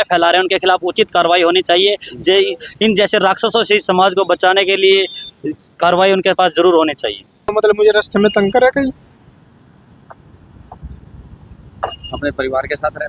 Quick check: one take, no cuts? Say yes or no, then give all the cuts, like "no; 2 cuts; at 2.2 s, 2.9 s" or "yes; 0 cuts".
no; 1 cut; at 7.5 s